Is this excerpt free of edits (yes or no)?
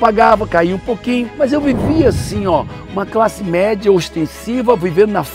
yes